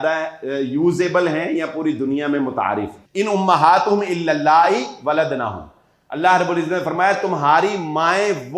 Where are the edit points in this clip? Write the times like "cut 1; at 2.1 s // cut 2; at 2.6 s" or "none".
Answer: cut 1; at 3.0 s